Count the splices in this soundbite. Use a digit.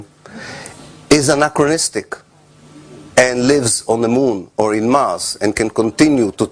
1